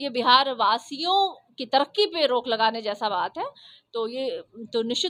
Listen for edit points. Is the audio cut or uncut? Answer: uncut